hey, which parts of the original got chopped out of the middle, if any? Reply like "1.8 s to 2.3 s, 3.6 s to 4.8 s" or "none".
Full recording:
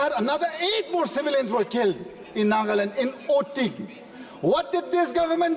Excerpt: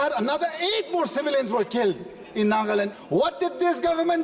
2.9 s to 4.2 s